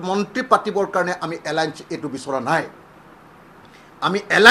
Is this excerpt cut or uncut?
uncut